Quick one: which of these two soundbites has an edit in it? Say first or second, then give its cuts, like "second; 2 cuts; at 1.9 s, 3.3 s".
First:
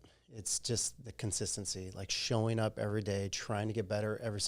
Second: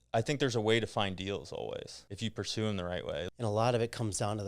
second; 2 cuts; at 2.0 s, 3.3 s